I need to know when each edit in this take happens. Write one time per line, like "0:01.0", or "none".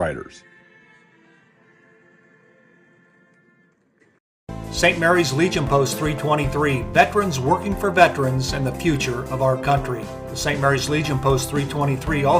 0:04.3